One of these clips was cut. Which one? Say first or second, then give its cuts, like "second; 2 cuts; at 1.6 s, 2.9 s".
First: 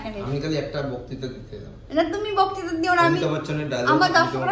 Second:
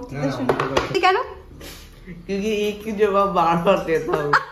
second; 1 cut; at 0.9 s